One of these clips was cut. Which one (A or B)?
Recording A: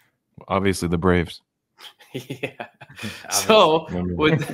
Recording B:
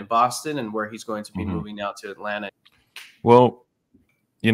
B